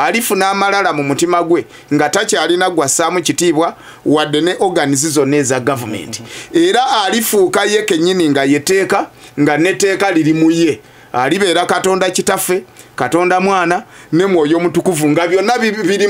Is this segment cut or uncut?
uncut